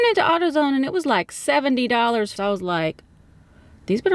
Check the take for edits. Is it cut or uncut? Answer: cut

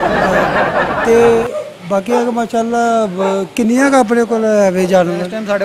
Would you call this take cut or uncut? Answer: cut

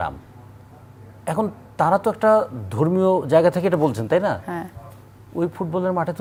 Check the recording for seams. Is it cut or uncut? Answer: uncut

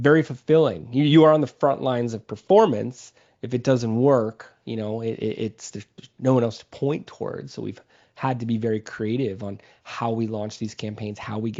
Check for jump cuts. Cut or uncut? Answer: uncut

